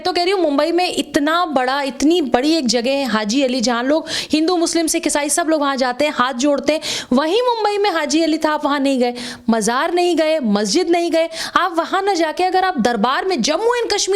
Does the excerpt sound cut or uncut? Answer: uncut